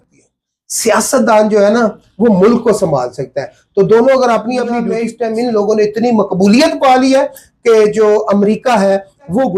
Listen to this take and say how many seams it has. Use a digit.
1